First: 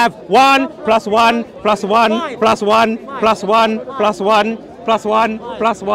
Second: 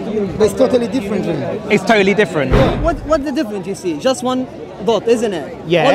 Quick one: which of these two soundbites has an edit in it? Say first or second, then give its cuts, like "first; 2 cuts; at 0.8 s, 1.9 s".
second; 1 cut; at 2.8 s